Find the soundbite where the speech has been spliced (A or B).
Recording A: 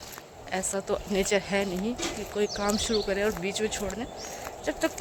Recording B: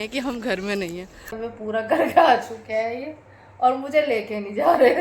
B